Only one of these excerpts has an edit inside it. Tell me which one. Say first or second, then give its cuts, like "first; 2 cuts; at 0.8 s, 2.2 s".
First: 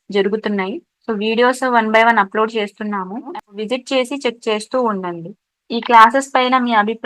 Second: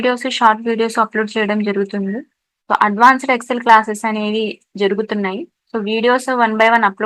first; 1 cut; at 3.3 s